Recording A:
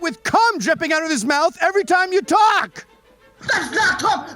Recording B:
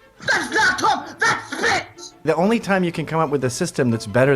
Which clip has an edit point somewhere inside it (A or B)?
B